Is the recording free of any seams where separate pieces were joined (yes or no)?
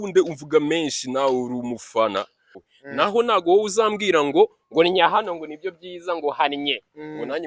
no